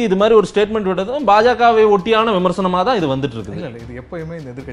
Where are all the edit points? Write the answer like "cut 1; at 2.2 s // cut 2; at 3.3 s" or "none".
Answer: none